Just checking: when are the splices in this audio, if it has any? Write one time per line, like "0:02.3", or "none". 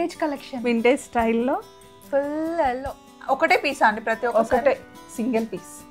0:03.1